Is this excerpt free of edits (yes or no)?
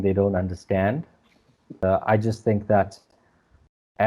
no